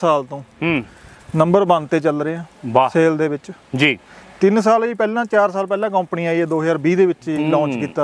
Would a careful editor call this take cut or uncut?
uncut